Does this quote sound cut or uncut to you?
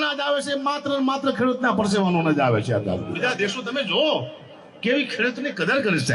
cut